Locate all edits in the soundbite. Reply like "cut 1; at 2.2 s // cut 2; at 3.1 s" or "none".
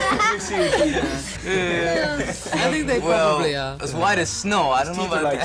cut 1; at 3.6 s